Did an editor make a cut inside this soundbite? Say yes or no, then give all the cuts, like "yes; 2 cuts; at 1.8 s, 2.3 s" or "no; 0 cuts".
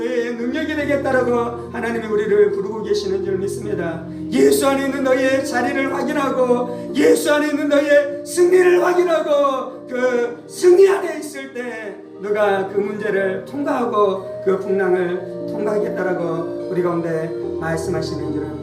no; 0 cuts